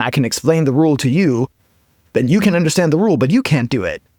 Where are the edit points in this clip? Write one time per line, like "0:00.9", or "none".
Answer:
none